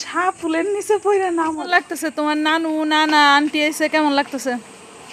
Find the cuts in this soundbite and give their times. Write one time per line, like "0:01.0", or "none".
0:01.7